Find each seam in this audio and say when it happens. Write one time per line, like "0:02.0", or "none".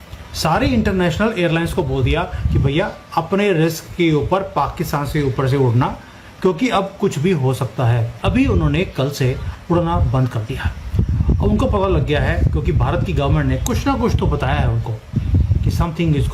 0:08.2

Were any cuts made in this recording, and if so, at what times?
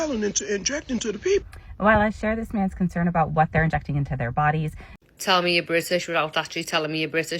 0:05.0

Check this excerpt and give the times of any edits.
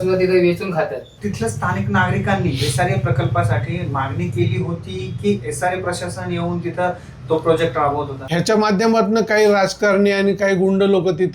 0:01.2
0:08.2

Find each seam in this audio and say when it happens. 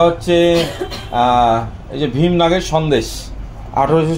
none

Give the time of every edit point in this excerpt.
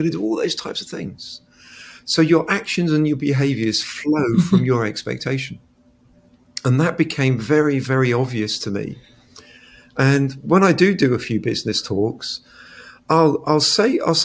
none

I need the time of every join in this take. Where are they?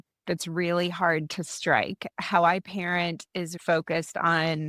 0:02.0
0:03.6

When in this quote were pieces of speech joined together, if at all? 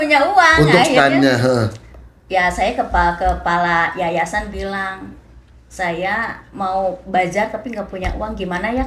none

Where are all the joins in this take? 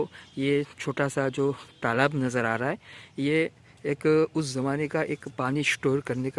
none

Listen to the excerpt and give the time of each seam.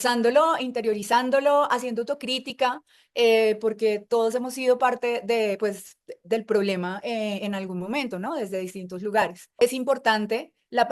0:09.6

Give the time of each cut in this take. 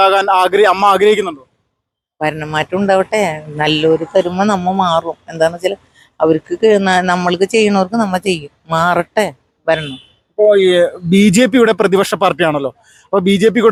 none

